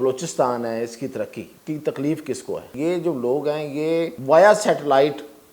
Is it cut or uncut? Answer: cut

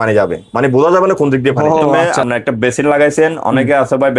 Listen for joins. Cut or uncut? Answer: cut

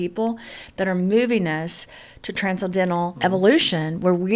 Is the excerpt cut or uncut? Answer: cut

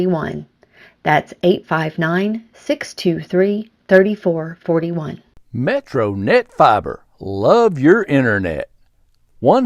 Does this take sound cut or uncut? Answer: cut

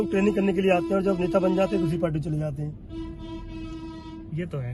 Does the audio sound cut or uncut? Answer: uncut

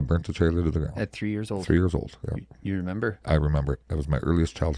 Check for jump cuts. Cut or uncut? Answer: uncut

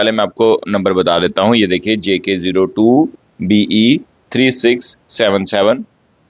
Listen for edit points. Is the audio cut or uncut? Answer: uncut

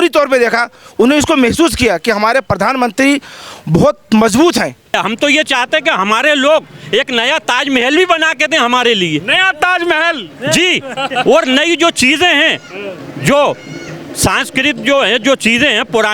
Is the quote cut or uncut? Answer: cut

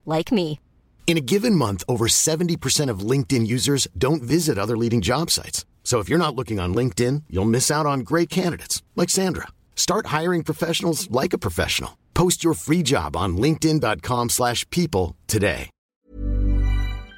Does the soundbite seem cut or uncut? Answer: cut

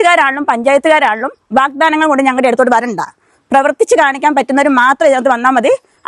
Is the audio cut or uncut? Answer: uncut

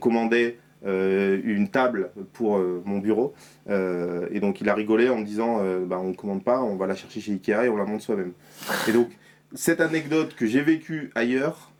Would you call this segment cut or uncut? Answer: uncut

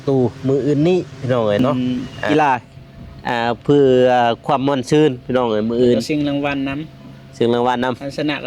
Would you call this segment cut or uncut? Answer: cut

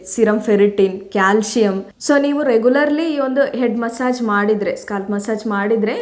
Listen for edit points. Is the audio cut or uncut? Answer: cut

